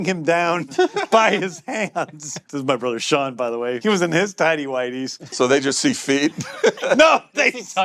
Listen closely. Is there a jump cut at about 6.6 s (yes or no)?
no